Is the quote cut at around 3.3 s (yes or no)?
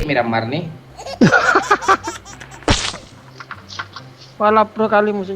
yes